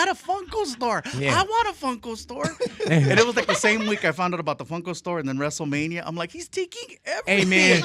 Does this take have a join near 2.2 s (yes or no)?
no